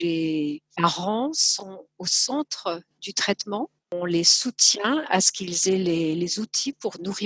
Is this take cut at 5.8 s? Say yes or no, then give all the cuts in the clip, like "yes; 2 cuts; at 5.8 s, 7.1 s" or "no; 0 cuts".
no; 1 cut; at 1.7 s